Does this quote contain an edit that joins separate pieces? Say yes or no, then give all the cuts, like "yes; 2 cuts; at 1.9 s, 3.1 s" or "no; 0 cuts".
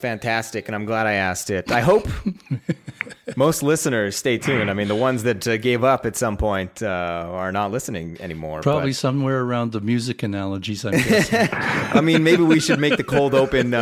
yes; 1 cut; at 8.6 s